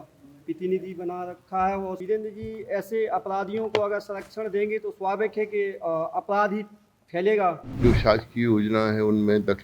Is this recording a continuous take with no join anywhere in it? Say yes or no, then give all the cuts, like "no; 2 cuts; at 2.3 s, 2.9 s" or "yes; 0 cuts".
no; 2 cuts; at 2.0 s, 7.7 s